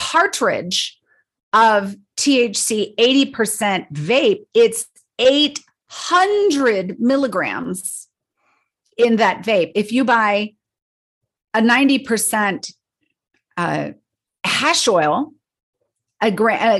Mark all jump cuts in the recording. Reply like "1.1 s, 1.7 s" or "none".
none